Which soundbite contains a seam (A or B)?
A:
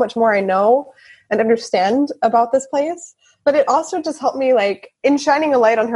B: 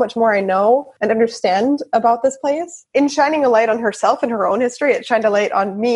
B